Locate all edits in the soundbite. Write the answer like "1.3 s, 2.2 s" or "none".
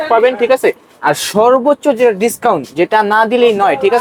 none